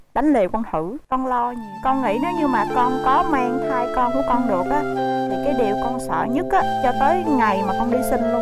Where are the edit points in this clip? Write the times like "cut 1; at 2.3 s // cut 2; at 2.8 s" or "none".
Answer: cut 1; at 1.0 s